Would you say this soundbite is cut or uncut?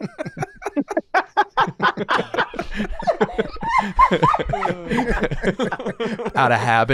uncut